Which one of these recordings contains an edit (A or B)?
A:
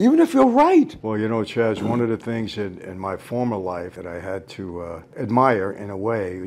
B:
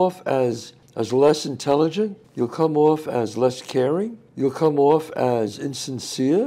A